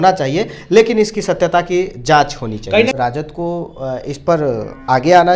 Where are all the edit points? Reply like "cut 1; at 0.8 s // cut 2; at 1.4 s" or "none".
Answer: cut 1; at 2.9 s